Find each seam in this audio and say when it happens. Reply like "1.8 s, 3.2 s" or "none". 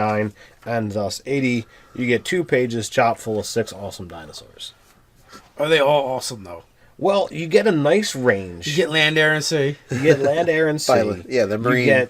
3.1 s